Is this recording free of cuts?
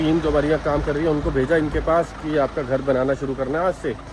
yes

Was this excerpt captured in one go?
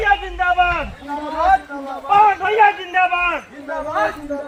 yes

